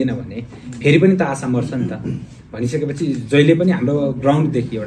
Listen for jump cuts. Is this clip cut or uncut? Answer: uncut